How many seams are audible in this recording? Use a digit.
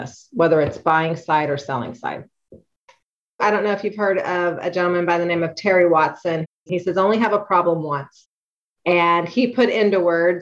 2